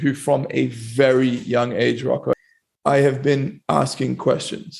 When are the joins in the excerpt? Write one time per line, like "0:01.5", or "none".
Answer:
0:02.4